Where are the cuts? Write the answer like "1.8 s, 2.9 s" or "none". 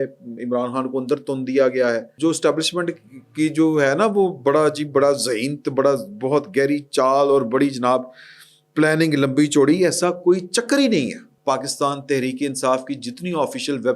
2.1 s, 11.3 s